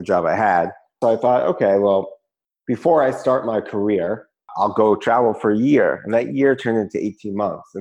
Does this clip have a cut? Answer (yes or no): yes